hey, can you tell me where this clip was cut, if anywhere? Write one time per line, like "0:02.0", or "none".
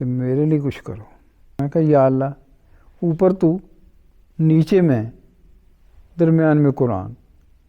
0:01.6